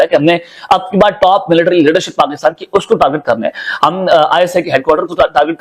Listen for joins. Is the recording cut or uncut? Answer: uncut